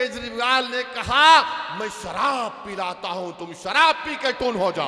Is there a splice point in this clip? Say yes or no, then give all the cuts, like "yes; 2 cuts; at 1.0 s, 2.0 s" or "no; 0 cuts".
no; 0 cuts